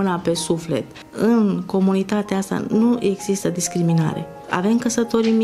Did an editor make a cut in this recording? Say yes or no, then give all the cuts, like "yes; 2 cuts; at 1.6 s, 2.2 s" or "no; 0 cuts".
yes; 2 cuts; at 1.0 s, 4.3 s